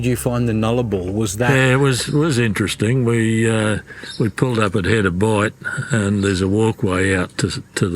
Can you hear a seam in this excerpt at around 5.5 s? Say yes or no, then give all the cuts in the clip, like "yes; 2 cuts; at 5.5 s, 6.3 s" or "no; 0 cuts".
no; 1 cut; at 1.5 s